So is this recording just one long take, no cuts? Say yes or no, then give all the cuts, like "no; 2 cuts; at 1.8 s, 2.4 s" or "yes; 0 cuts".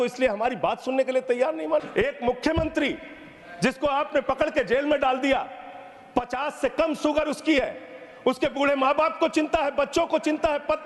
no; 1 cut; at 1.9 s